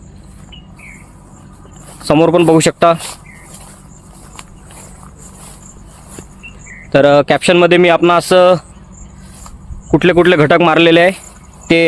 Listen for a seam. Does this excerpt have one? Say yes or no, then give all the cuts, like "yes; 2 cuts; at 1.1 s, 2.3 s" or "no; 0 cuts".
yes; 1 cut; at 10.0 s